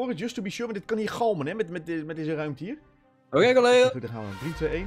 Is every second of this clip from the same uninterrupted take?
yes; 0 cuts

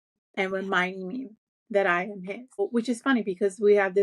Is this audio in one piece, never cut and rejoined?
no; 1 cut; at 2.6 s

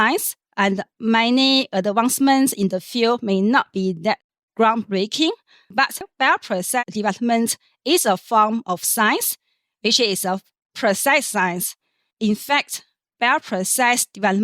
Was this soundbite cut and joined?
yes; 1 cut; at 12.1 s

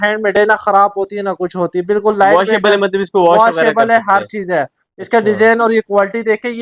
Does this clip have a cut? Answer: no; 0 cuts

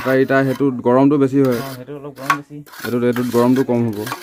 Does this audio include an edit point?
no; 0 cuts

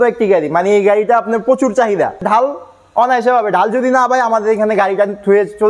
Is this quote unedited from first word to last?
no; 1 cut; at 2.2 s

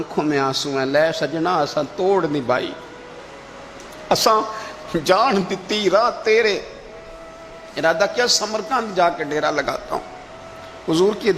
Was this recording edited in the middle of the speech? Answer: no; 0 cuts

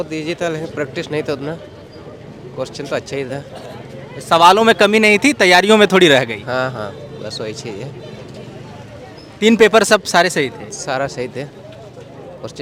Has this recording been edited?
no; 0 cuts

